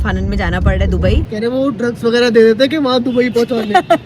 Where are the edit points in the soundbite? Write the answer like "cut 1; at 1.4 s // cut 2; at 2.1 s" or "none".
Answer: cut 1; at 1.3 s